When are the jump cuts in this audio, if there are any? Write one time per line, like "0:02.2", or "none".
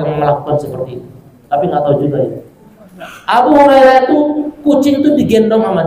none